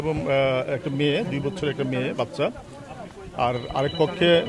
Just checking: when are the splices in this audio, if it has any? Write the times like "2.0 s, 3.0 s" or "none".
none